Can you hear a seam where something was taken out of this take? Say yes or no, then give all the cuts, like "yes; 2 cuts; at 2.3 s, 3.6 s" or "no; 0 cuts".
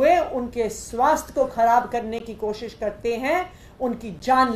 no; 0 cuts